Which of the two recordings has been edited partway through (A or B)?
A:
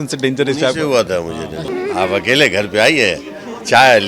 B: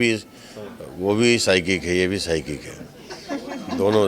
A